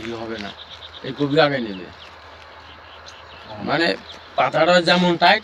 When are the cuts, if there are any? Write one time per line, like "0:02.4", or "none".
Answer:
none